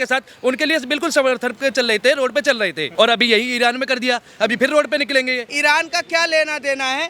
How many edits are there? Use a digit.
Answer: 2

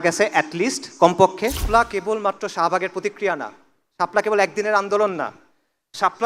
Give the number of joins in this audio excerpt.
1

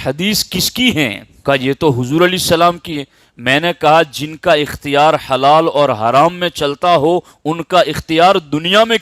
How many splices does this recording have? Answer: 1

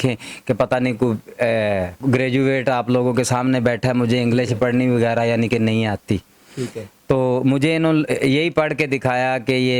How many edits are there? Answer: 1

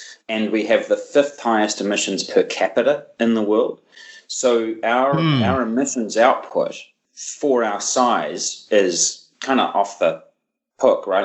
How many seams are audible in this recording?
0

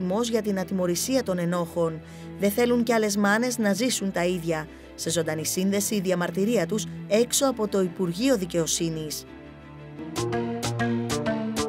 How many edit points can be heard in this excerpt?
1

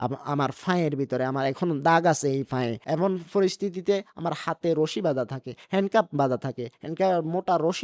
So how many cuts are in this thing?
0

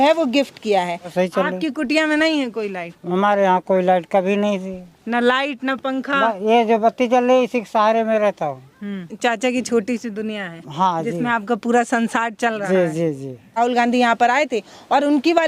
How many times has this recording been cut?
3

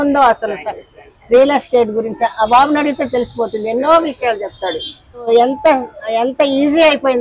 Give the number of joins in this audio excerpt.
1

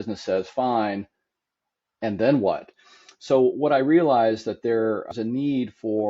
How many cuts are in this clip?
2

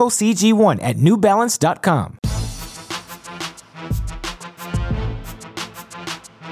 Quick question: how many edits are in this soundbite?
1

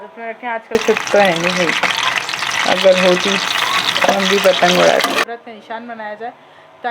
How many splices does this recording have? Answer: 2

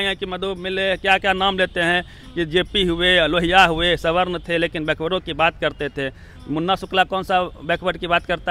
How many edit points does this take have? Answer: 0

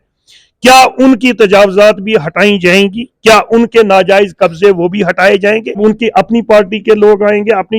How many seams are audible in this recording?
1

